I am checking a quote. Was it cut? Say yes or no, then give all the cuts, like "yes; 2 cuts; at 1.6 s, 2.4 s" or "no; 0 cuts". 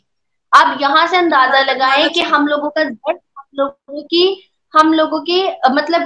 no; 0 cuts